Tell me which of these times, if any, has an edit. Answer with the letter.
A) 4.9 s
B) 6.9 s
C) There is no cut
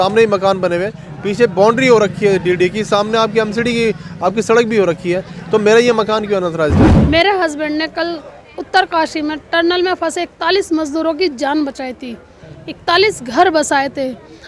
B